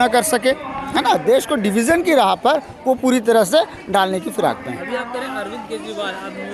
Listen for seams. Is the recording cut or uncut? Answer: uncut